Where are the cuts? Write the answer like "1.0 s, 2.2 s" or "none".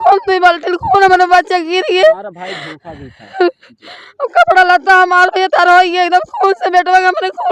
none